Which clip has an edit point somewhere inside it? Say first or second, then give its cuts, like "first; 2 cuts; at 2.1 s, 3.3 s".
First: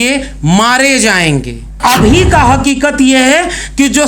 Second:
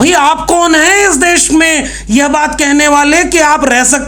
first; 1 cut; at 1.8 s